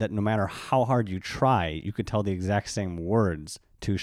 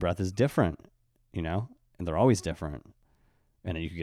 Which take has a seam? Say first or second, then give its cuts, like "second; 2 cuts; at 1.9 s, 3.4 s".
second; 1 cut; at 3.1 s